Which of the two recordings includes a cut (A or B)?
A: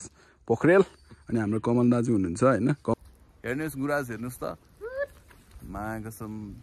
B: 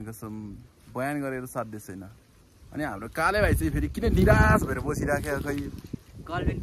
A